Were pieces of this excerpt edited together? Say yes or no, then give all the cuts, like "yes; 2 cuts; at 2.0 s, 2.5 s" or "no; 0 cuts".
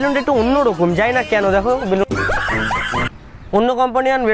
yes; 1 cut; at 3.1 s